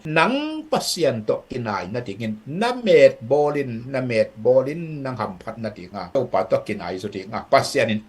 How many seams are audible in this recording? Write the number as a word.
one